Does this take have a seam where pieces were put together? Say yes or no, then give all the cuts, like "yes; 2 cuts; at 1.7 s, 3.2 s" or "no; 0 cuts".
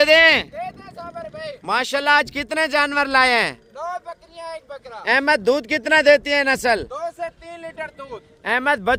no; 0 cuts